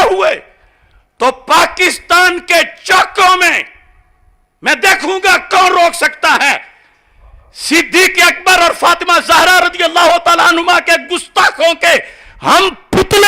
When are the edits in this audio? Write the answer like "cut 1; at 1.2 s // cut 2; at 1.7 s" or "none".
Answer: none